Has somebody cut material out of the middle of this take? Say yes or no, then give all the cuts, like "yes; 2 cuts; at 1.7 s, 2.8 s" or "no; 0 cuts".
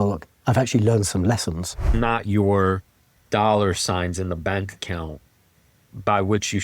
yes; 1 cut; at 1.9 s